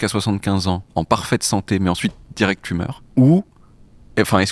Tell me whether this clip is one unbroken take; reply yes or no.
no